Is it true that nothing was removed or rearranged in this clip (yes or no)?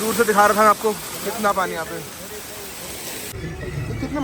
no